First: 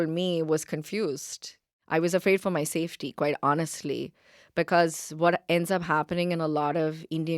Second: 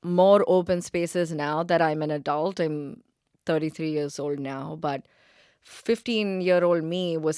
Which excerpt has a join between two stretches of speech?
first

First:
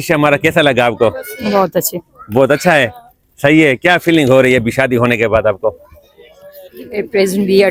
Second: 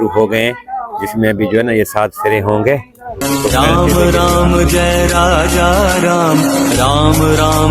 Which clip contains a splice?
second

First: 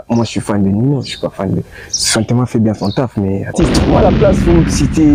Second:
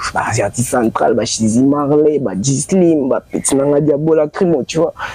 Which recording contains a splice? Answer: first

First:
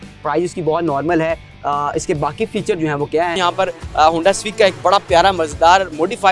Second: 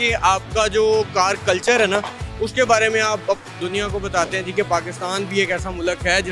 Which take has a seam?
first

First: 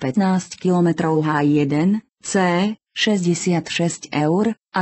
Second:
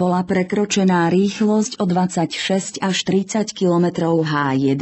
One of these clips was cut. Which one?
first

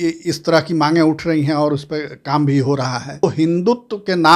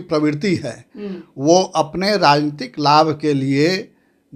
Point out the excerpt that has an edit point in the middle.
first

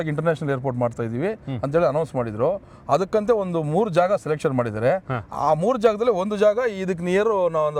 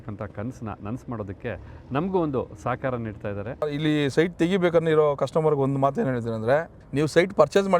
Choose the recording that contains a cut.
second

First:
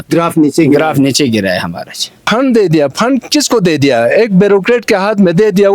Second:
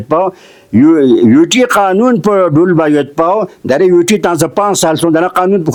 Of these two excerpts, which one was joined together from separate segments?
first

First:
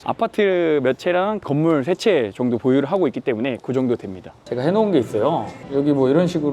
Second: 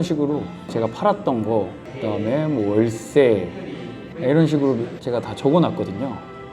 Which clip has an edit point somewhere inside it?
first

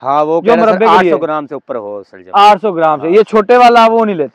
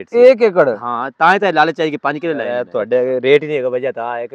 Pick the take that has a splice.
second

